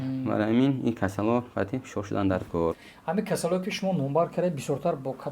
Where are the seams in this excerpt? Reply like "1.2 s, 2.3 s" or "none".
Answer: 2.8 s